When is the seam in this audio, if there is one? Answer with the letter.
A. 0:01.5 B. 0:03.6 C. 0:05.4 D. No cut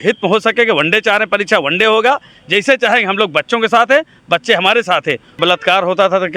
C